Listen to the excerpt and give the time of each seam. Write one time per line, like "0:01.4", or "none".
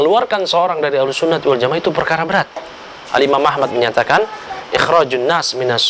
none